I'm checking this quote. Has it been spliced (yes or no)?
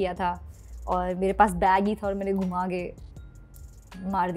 no